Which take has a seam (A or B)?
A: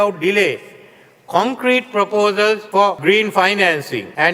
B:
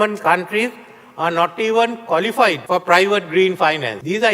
B